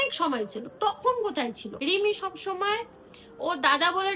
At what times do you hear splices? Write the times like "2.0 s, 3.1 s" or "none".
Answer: 1.7 s